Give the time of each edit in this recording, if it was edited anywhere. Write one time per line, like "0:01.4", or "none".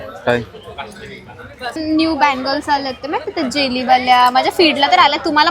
0:01.8